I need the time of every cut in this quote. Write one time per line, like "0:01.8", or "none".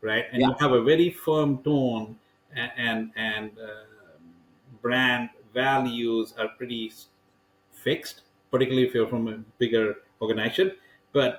none